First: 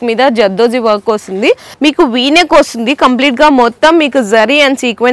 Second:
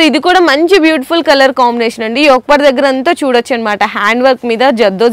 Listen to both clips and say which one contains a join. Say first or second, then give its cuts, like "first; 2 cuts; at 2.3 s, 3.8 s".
first; 1 cut; at 1.7 s